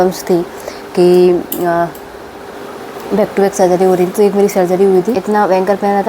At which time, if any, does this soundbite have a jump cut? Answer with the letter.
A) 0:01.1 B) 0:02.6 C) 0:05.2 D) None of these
C